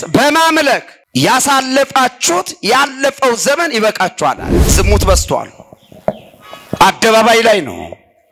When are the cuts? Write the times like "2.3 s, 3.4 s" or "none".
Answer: 1.0 s, 4.5 s